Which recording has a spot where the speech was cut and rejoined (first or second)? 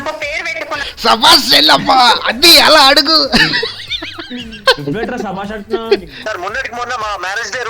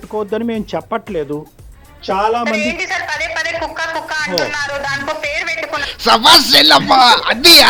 first